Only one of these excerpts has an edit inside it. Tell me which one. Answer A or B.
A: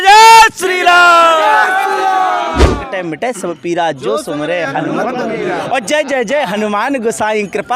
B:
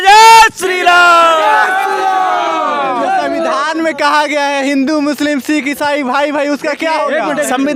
A